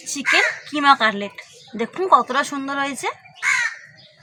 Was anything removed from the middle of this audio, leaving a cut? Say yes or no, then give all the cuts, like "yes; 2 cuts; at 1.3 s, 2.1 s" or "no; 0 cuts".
no; 0 cuts